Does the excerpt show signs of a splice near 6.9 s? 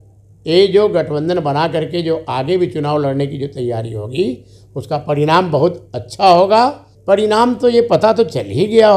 yes; 1 cut; at 6.9 s

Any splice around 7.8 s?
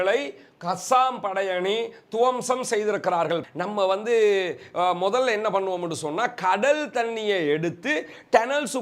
no; 1 cut; at 3.4 s

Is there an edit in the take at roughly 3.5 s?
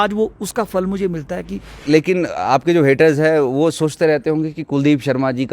no; 1 cut; at 1.7 s

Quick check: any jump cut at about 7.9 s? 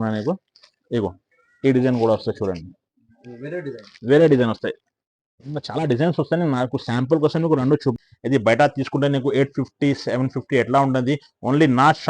yes; 1 cut; at 7.9 s

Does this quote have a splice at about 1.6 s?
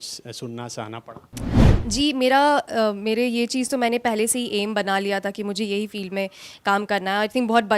yes; 1 cut; at 1.6 s

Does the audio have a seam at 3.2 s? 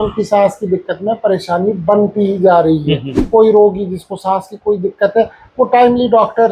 yes; 1 cut; at 3.2 s

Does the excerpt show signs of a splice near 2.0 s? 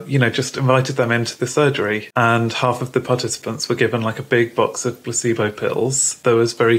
yes; 1 cut; at 2.0 s

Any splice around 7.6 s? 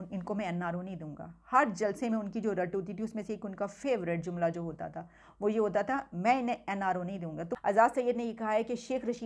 yes; 1 cut; at 7.6 s

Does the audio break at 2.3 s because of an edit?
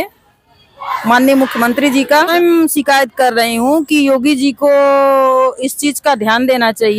yes; 1 cut; at 2.3 s

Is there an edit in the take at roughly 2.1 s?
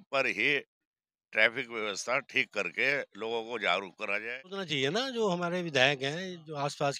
no; 1 cut; at 4.7 s

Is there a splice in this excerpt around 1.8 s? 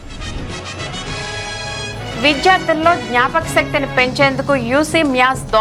no; 0 cuts

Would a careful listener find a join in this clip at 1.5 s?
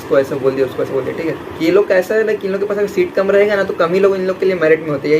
yes; 1 cut; at 1.5 s

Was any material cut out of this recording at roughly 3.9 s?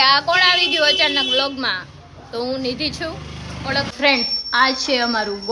yes; 1 cut; at 3.9 s

